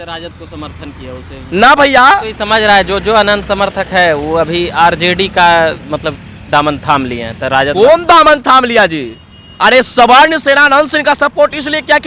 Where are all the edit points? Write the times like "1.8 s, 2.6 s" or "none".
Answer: 2.3 s